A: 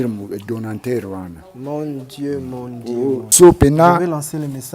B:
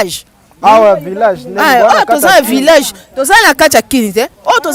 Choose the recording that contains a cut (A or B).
A